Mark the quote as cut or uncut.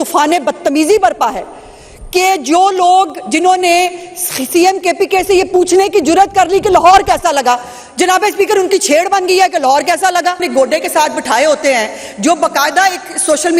cut